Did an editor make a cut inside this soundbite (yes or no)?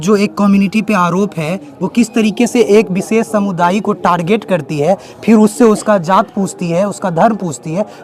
no